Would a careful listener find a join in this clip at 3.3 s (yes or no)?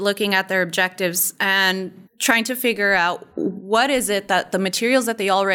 yes